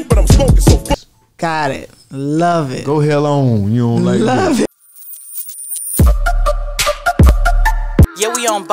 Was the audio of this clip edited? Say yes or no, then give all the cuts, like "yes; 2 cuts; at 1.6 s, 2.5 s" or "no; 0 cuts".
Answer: yes; 2 cuts; at 1.0 s, 4.6 s